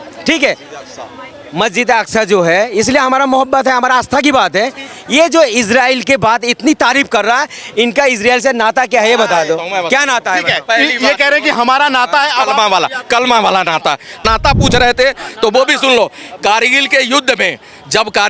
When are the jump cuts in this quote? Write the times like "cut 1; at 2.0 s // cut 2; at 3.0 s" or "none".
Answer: cut 1; at 14.2 s